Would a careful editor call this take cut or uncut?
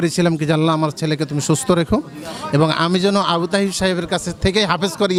uncut